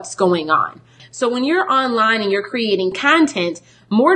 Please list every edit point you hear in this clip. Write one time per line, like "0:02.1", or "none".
0:01.0